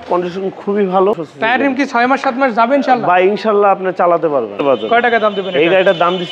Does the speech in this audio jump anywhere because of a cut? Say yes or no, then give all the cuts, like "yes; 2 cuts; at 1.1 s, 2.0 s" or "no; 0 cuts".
yes; 2 cuts; at 1.3 s, 4.6 s